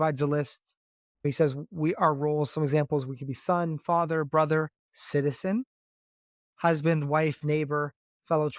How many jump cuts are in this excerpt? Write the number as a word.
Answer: one